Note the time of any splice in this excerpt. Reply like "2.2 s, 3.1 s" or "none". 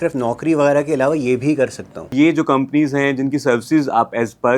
2.1 s

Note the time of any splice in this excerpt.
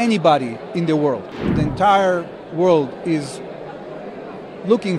1.5 s

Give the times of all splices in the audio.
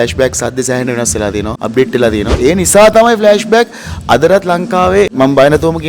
1.6 s, 2.3 s, 5.1 s

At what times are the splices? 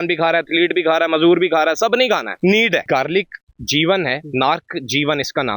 2.8 s

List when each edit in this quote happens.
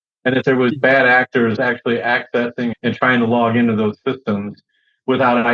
none

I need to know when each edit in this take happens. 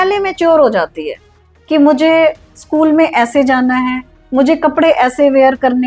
none

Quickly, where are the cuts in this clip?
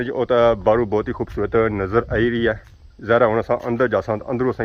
none

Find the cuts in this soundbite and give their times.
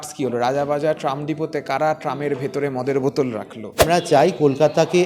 3.8 s

